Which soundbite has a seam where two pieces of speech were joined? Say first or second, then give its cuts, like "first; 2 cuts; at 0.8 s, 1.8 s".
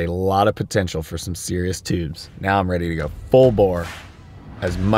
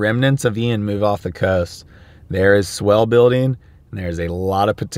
first; 1 cut; at 2.3 s